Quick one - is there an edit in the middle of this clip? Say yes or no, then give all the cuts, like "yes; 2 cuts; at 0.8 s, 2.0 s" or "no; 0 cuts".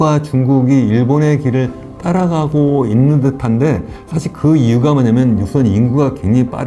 no; 0 cuts